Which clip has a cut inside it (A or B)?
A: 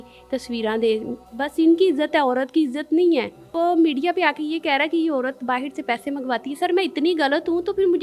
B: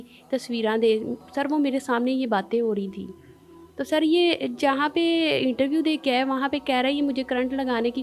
A